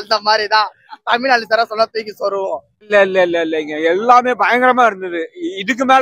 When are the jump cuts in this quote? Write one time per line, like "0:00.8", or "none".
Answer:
0:02.9